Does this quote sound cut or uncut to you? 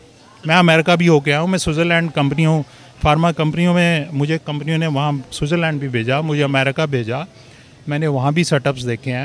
uncut